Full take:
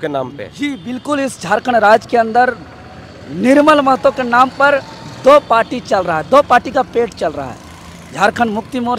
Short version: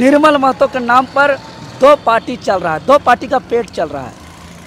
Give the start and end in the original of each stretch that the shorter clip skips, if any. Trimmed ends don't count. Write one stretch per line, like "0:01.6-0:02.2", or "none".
none